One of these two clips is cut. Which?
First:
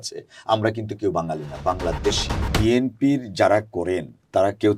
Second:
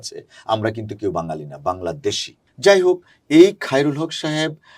first; 1 cut; at 2.4 s

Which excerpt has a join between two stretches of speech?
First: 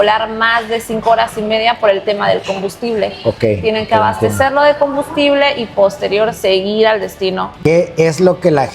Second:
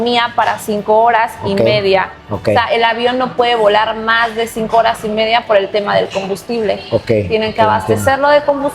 first; 1 cut; at 7.5 s

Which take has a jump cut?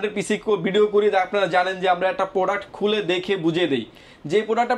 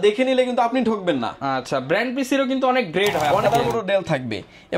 second; 1 cut; at 3.5 s

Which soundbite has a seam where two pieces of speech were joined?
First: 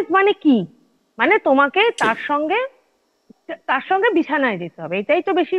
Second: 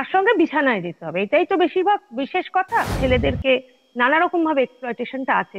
second; 1 cut; at 2.9 s

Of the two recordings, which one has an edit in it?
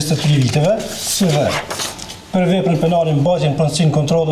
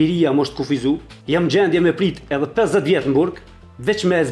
second; 1 cut; at 1.1 s

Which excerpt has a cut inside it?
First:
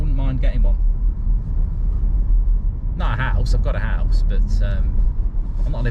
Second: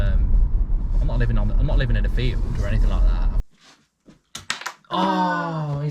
second; 1 cut; at 3.3 s

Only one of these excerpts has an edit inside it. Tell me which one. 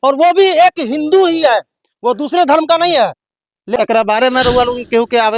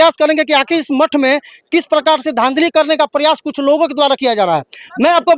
first; 1 cut; at 3.8 s

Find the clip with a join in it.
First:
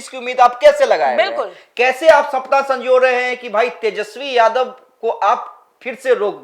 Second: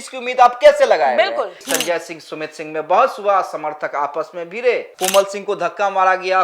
second; 2 cuts; at 1.6 s, 4.9 s

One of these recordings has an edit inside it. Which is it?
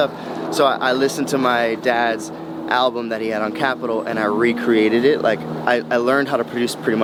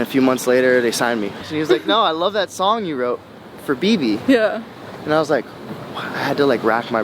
second; 1 cut; at 1.5 s

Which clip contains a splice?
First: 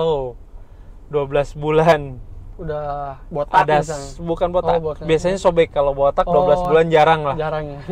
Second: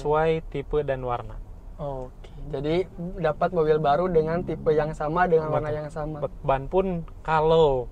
second; 1 cut; at 6.3 s

